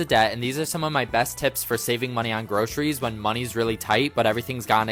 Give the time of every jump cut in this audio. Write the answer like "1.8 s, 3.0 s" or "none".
none